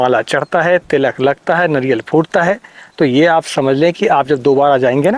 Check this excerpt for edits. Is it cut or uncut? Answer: uncut